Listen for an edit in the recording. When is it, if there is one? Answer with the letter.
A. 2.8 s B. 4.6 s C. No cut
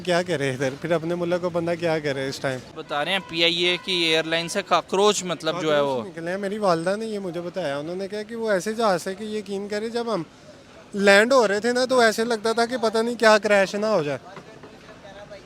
A